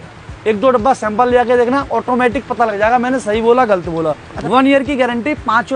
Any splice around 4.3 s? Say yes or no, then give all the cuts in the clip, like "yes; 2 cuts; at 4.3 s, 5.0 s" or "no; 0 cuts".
yes; 1 cut; at 4.3 s